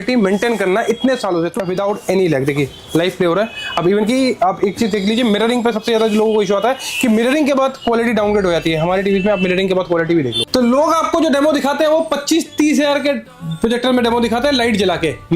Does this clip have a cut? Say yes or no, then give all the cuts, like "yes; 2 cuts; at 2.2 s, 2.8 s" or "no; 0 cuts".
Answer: yes; 2 cuts; at 1.5 s, 10.4 s